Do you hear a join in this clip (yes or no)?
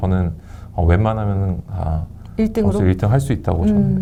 no